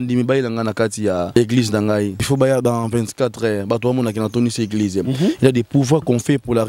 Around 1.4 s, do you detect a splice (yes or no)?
yes